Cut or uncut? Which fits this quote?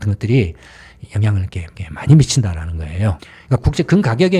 cut